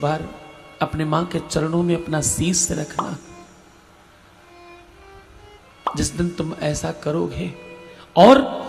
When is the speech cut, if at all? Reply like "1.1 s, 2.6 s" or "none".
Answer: none